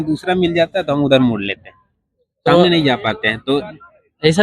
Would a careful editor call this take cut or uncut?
uncut